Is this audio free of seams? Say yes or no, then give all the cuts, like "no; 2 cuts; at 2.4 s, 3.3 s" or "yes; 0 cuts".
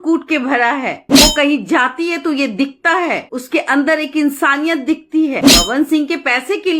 no; 1 cut; at 5.4 s